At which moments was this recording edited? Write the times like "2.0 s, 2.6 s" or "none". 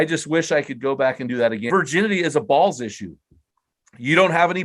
1.6 s